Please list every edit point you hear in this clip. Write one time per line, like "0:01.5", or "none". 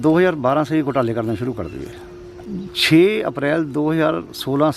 0:02.5